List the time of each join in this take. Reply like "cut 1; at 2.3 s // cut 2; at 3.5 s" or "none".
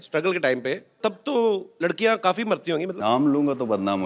cut 1; at 1.0 s // cut 2; at 1.7 s // cut 3; at 2.9 s